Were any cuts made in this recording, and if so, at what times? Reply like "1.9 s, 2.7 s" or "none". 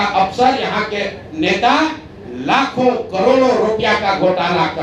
none